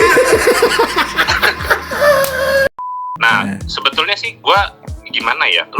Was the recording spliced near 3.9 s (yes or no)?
no